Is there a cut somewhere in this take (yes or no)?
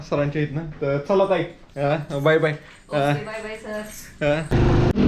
no